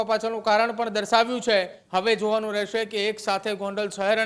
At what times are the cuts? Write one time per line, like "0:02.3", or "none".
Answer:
0:01.8